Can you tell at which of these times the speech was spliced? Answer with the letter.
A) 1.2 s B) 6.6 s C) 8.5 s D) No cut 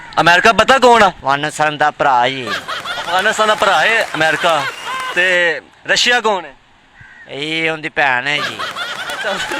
A